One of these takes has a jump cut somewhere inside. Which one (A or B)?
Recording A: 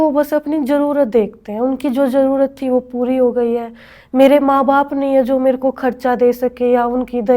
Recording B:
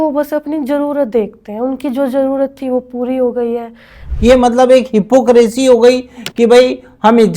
B